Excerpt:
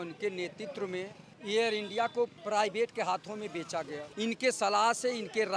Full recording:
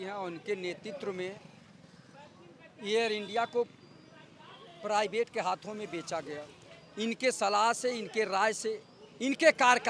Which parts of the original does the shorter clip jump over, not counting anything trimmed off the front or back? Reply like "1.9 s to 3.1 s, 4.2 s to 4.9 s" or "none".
1.5 s to 2.6 s, 3.8 s to 4.8 s, 6.4 s to 6.8 s